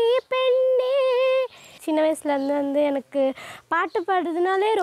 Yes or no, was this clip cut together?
yes